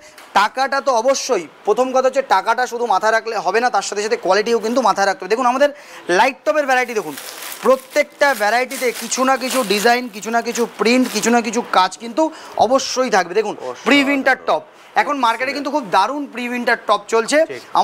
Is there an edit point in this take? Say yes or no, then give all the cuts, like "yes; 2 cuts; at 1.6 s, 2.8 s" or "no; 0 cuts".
no; 0 cuts